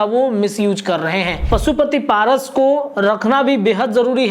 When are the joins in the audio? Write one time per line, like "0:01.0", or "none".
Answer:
0:01.4